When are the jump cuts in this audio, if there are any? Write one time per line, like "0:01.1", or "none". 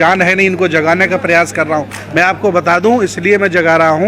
none